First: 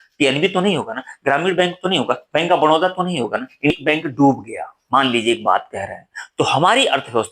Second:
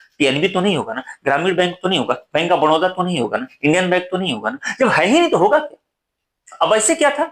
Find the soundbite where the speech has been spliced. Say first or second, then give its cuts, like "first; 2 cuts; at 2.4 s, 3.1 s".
first; 1 cut; at 3.7 s